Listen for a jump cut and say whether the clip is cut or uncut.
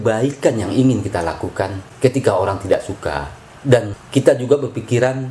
uncut